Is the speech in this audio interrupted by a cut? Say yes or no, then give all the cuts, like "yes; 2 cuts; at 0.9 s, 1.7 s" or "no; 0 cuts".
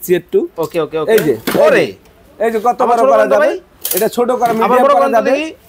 no; 0 cuts